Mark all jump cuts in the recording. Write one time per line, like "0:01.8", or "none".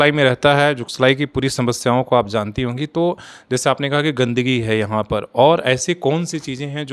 none